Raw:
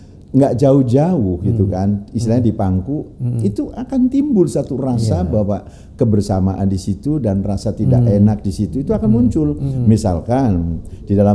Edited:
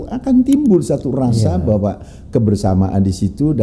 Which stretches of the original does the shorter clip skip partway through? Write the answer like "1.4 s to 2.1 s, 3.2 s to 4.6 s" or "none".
none